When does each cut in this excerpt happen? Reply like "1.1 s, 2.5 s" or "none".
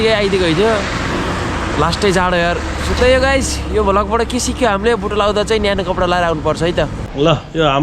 6.9 s

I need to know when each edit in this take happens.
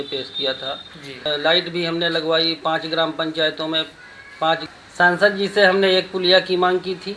1.3 s, 4.7 s

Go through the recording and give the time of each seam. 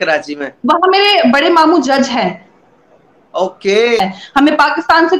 4.0 s

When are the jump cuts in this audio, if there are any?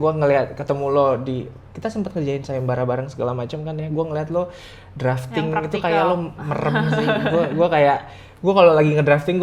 none

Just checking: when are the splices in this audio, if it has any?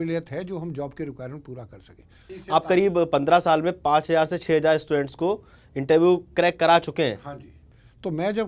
2.4 s

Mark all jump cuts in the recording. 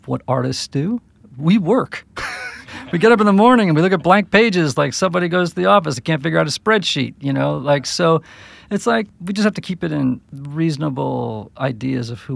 9.2 s, 10.4 s

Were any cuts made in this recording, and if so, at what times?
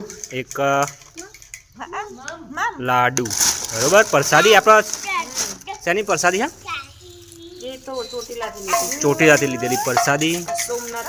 none

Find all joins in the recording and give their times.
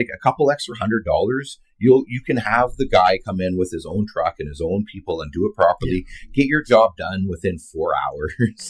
none

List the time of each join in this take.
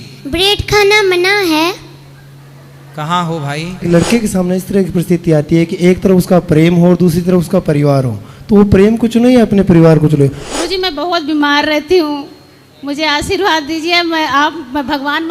3.8 s, 10.4 s

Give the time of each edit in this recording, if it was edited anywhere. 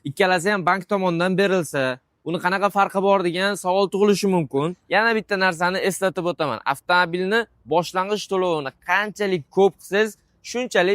4.8 s

